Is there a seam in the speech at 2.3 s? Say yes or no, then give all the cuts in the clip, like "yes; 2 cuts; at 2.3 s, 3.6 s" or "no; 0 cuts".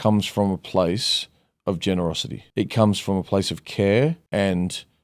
yes; 2 cuts; at 2.3 s, 4.2 s